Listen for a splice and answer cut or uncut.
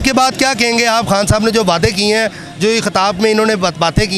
uncut